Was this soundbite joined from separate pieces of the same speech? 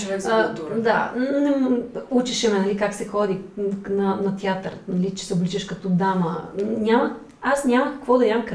no; 0 cuts

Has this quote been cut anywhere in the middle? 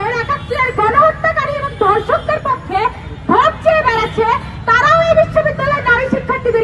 no; 0 cuts

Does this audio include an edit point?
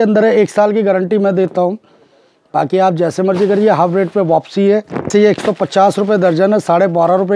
yes; 1 cut; at 5.1 s

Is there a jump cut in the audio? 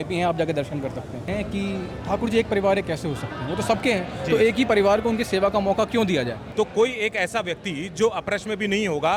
yes; 2 cuts; at 1.3 s, 6.4 s

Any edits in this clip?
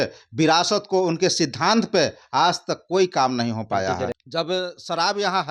yes; 1 cut; at 4.1 s

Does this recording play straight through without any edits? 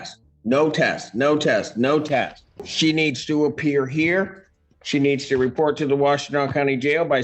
no; 1 cut; at 2.5 s

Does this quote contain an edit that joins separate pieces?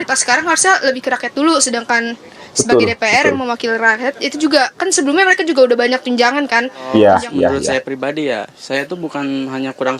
no; 0 cuts

